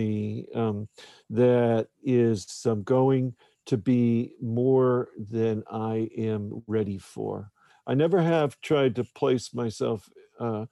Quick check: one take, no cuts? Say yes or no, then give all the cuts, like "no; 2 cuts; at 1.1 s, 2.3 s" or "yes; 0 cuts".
no; 1 cut; at 7.7 s